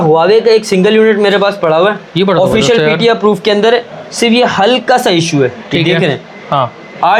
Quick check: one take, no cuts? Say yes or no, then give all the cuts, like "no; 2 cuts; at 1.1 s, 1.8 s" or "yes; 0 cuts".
yes; 0 cuts